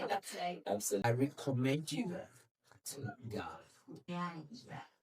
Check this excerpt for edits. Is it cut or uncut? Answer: cut